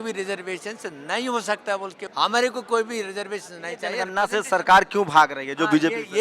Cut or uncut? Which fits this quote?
cut